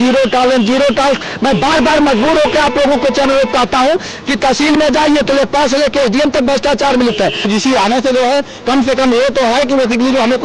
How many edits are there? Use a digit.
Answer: 1